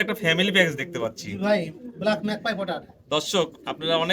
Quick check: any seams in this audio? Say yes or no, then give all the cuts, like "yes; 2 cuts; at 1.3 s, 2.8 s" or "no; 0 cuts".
no; 0 cuts